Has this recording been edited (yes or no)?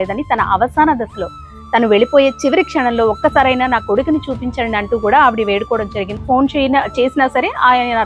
yes